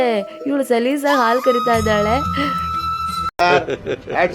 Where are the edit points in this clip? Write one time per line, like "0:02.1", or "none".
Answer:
none

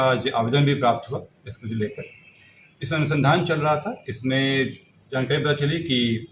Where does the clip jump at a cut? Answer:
none

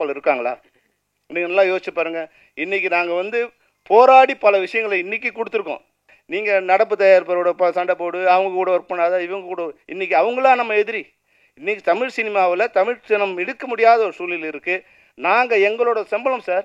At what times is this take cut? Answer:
0:06.0

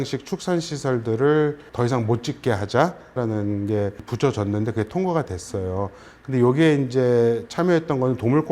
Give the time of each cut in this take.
0:01.6
0:03.2
0:04.1

